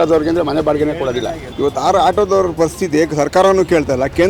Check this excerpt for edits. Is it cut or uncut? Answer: cut